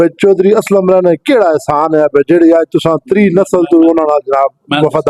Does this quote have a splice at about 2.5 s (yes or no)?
no